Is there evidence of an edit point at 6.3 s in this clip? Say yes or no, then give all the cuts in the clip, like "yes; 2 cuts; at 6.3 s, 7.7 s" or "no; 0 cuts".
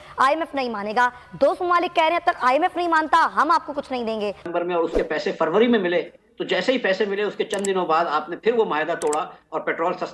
no; 1 cut; at 4.5 s